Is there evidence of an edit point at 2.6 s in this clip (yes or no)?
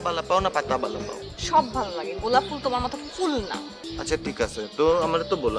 no